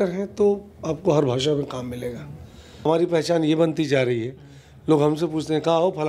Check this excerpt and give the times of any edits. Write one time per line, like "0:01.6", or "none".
0:02.9